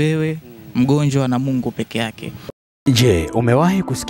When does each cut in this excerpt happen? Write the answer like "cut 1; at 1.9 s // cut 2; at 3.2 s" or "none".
cut 1; at 2.6 s